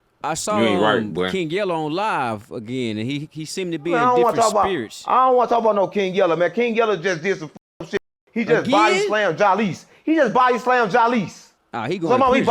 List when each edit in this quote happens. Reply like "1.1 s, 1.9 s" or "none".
none

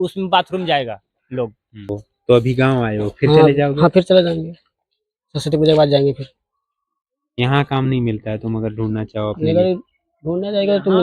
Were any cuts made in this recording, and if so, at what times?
1.7 s

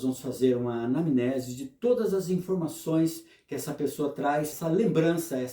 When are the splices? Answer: 4.5 s

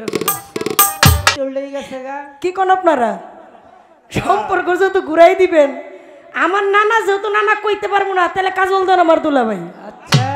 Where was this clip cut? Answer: 1.3 s

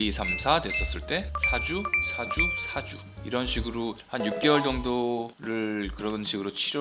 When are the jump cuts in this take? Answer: none

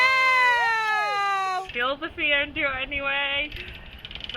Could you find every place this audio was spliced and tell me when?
1.7 s

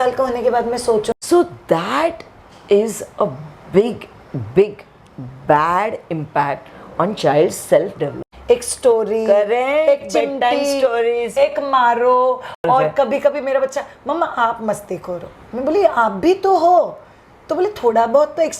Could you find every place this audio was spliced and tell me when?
1.2 s, 8.3 s

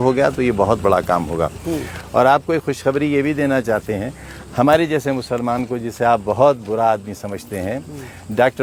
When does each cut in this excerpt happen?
none

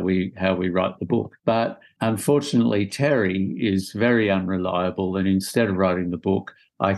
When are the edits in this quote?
1.4 s

